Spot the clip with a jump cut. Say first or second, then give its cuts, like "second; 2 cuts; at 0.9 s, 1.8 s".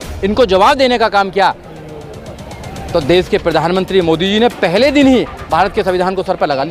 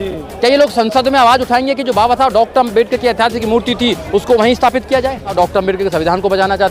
second; 1 cut; at 5.3 s